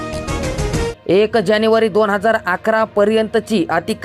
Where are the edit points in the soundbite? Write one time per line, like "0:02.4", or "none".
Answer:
0:01.0